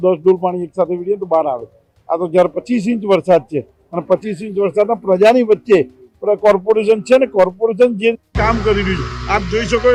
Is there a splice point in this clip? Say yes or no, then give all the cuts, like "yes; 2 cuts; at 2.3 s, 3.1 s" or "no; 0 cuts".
no; 0 cuts